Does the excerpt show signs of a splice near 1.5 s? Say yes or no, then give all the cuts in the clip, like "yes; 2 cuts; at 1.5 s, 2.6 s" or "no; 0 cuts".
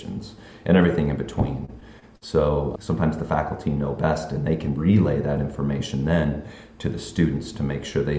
no; 1 cut; at 2.7 s